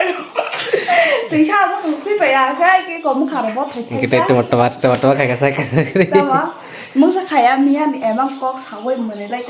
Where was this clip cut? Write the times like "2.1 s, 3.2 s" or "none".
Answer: none